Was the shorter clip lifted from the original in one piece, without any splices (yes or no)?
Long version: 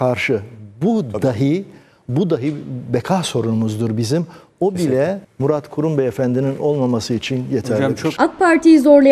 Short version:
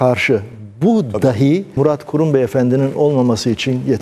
no